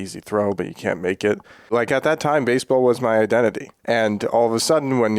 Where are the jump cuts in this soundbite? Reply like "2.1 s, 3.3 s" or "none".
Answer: 1.7 s, 3.7 s